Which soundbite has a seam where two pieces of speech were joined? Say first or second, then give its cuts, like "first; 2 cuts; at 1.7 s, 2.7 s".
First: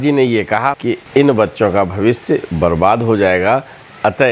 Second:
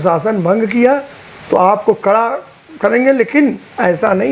first; 1 cut; at 0.9 s